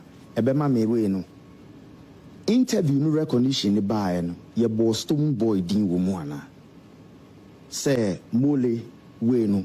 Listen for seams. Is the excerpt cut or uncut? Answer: uncut